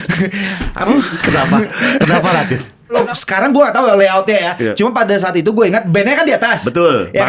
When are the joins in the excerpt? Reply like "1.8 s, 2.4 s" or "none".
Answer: 3.0 s